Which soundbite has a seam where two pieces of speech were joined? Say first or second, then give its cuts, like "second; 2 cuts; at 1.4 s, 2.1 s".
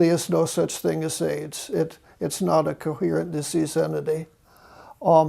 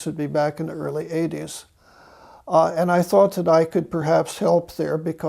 second; 1 cut; at 2.6 s